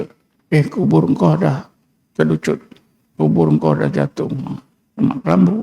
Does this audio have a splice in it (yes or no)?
no